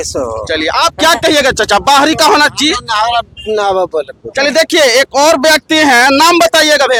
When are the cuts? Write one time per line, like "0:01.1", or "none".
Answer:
none